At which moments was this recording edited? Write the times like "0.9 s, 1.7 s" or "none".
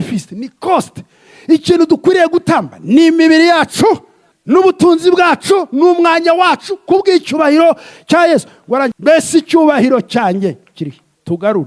8.9 s

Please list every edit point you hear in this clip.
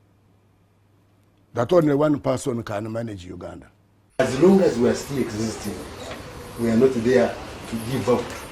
4.0 s

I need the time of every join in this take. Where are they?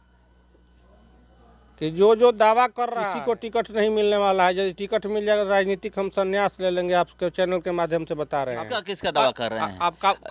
2.9 s, 8.8 s

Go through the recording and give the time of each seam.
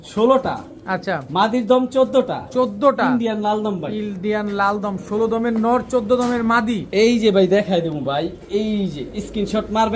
none

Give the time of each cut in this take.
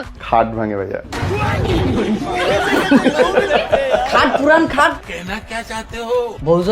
5.0 s

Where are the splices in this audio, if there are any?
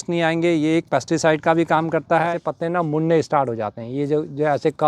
2.3 s

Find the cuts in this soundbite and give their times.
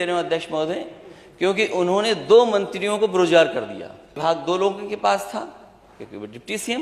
4.2 s

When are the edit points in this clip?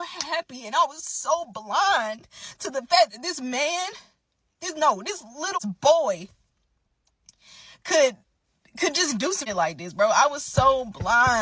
5.6 s, 9.4 s

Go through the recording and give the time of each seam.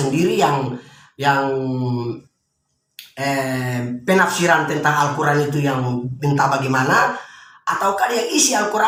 none

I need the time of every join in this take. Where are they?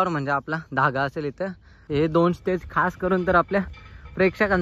1.8 s

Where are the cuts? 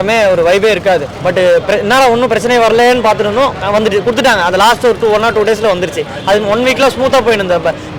1.1 s

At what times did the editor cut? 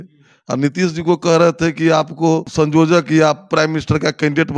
2.5 s

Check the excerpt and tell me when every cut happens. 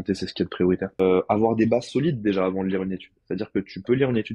1.0 s

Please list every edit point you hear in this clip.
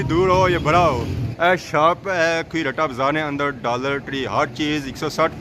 1.3 s

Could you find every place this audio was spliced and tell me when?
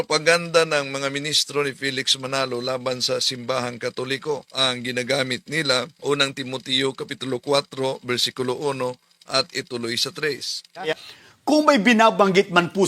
4.5 s, 5.9 s, 10.9 s

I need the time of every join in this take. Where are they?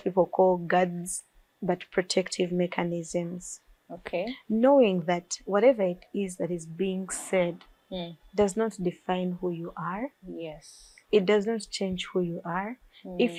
none

